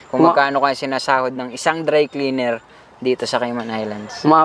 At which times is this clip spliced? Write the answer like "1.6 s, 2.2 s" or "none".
none